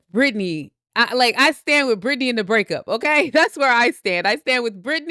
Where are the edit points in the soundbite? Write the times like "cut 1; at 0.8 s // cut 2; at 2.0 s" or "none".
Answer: none

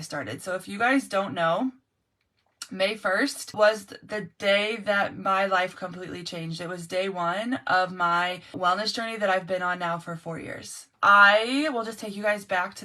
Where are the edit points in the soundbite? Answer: cut 1; at 3.5 s // cut 2; at 8.6 s // cut 3; at 10.9 s

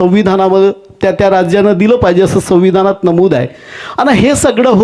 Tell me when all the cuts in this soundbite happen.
none

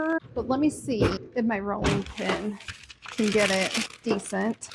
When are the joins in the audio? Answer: none

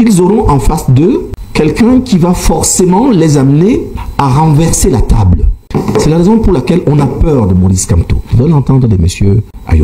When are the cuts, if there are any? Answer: cut 1; at 1.4 s // cut 2; at 4.0 s // cut 3; at 5.5 s // cut 4; at 8.3 s

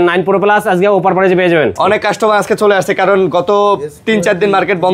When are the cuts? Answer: cut 1; at 1.8 s

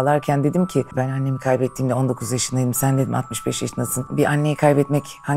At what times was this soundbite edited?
cut 1; at 0.9 s // cut 2; at 4.1 s

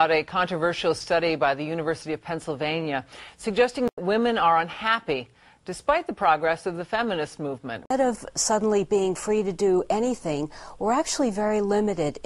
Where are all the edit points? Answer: cut 1; at 7.9 s

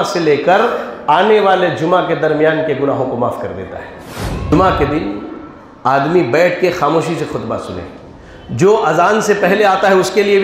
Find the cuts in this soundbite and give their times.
cut 1; at 4.5 s

